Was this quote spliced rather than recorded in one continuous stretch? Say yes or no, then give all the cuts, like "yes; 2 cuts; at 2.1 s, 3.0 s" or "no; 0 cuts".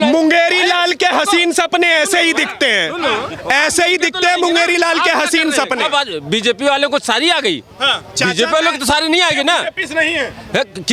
no; 0 cuts